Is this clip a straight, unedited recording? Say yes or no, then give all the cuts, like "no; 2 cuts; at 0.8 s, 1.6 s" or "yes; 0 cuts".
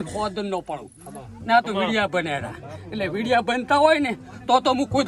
yes; 0 cuts